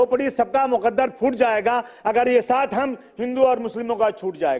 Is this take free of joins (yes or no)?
yes